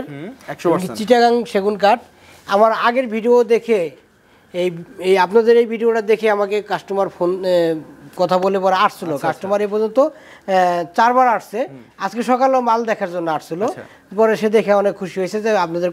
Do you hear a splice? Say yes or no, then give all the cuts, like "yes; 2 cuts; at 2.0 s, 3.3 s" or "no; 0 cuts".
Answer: no; 0 cuts